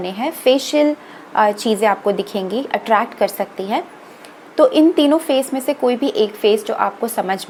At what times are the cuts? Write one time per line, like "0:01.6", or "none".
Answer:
none